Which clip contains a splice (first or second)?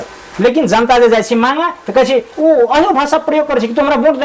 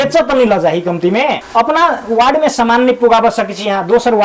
second